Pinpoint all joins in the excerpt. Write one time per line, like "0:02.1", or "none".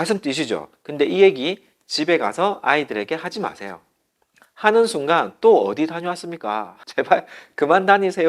0:06.8